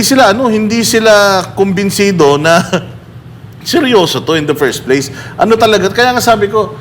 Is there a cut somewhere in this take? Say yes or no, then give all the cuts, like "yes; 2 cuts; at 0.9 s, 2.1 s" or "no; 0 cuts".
no; 0 cuts